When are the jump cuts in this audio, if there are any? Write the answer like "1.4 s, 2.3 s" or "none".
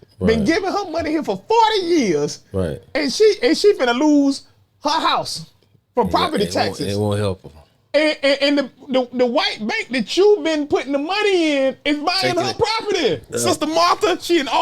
13.3 s